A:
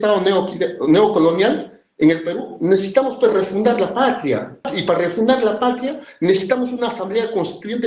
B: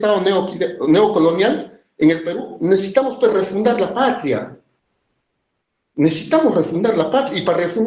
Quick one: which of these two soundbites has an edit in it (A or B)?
A